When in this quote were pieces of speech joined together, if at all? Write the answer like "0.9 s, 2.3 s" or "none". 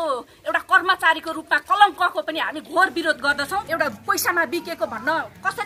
3.7 s